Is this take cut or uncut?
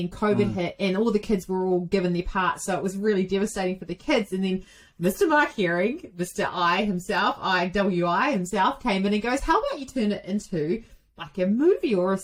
uncut